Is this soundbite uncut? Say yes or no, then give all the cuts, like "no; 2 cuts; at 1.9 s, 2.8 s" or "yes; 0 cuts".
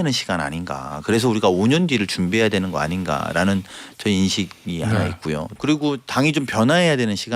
no; 1 cut; at 5.6 s